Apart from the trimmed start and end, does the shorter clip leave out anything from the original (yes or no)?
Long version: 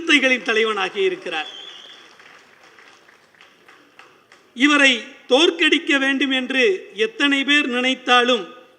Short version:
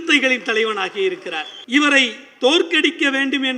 yes